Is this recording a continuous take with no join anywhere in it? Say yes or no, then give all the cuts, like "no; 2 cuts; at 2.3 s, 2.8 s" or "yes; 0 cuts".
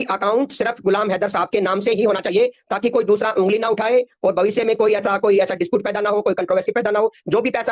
yes; 0 cuts